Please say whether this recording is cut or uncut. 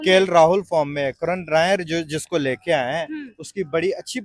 uncut